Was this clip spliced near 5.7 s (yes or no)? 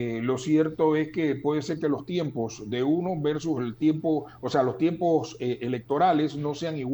no